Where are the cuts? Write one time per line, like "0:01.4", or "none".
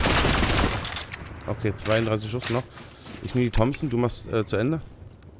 none